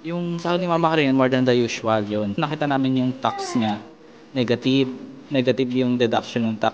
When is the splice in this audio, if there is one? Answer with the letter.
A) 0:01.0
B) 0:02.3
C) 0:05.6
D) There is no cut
B